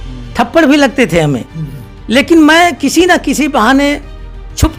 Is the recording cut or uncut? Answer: uncut